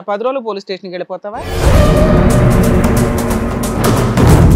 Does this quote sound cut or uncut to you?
cut